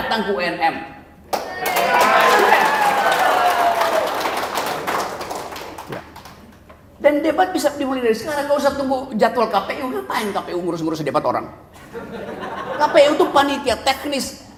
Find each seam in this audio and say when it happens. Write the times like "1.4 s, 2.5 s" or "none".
none